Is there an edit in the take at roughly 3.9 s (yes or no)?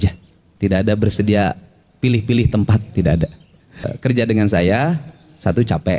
yes